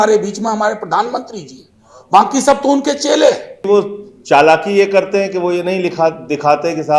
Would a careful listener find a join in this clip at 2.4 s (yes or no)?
no